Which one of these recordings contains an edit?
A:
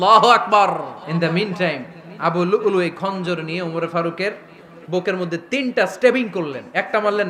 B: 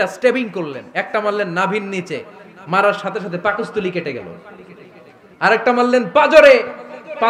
A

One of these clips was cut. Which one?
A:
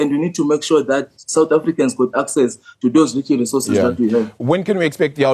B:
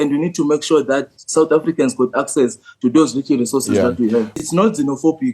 B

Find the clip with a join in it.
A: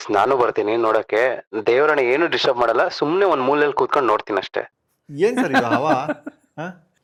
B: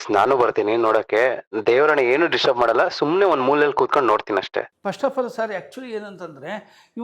B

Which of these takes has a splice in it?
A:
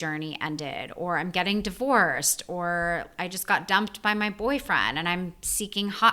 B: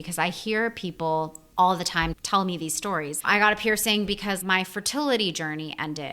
B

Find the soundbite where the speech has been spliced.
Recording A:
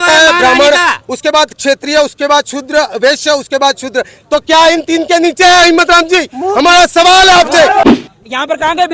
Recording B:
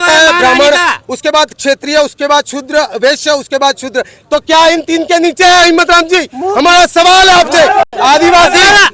A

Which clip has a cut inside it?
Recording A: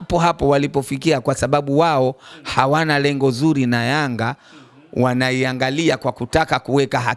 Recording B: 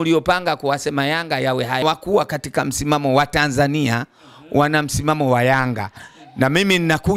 B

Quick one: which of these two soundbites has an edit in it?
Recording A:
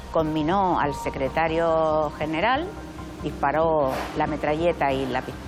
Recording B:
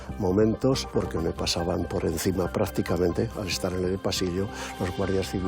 B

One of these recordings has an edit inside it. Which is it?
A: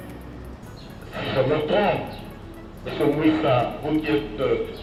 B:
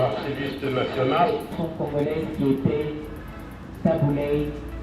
B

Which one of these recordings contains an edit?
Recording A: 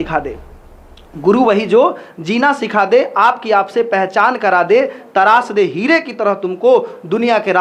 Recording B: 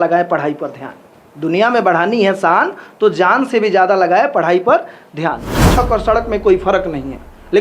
B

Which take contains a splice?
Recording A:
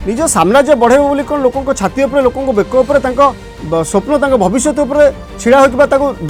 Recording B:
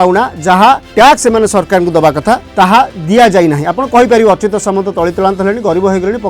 B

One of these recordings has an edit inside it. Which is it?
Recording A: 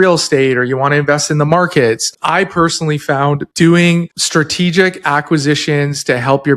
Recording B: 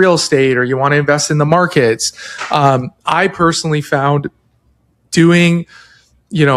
A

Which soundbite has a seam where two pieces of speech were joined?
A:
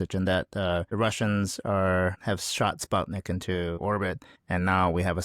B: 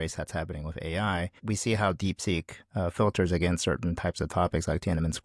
B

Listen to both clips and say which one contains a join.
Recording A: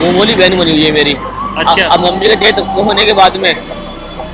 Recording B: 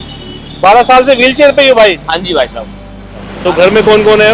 B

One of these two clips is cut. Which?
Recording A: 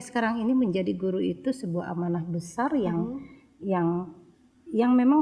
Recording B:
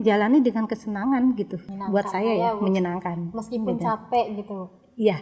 B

